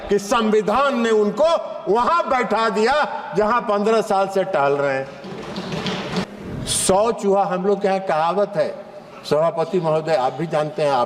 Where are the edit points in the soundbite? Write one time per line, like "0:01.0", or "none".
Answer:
0:06.3